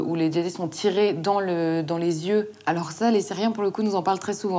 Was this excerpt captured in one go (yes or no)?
no